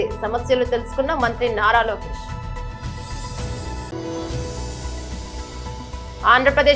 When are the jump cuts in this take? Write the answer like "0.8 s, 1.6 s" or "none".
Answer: 2.0 s, 3.9 s, 5.2 s